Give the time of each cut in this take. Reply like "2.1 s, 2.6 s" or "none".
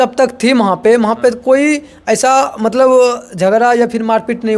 none